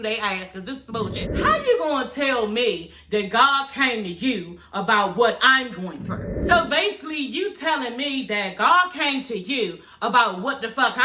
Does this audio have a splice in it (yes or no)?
yes